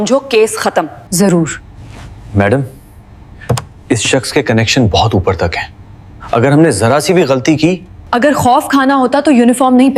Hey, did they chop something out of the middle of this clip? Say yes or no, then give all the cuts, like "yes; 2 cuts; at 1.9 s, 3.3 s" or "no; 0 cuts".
no; 0 cuts